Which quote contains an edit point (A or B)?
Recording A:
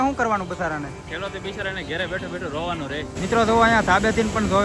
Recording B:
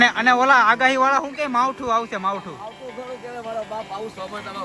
A